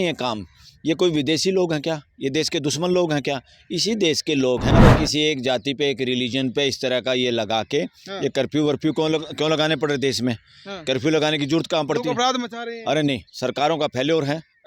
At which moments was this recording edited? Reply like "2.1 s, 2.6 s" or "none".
4.7 s